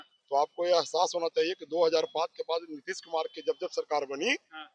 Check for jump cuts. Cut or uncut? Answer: uncut